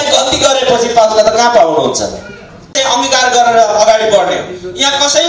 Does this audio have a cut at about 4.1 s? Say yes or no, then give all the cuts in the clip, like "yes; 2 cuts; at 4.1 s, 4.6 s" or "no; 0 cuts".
no; 1 cut; at 2.7 s